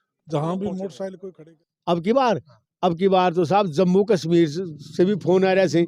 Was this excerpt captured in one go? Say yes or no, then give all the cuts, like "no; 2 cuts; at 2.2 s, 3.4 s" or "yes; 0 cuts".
no; 1 cut; at 1.3 s